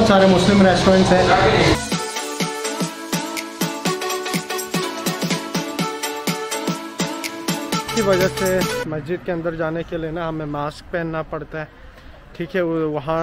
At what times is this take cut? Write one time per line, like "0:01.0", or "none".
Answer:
none